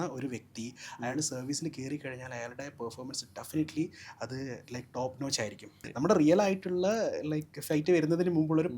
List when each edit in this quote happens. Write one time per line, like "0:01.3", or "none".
0:05.8